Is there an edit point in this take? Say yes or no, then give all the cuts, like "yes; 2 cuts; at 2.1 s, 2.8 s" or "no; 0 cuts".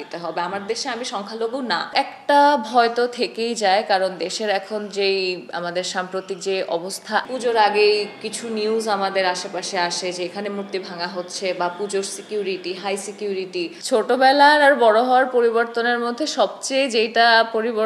yes; 3 cuts; at 1.9 s, 7.3 s, 13.8 s